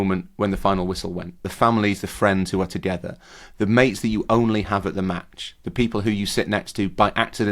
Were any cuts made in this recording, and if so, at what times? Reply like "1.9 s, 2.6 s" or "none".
1.5 s